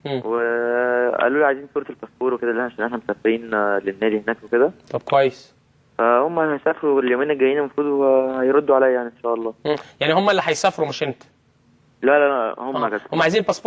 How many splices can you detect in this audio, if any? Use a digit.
1